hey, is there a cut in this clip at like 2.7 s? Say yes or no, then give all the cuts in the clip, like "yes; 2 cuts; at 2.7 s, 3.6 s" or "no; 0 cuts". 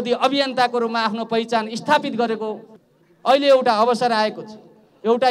yes; 1 cut; at 2.7 s